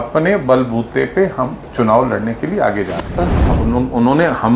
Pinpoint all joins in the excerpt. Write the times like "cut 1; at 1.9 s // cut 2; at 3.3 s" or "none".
cut 1; at 3.2 s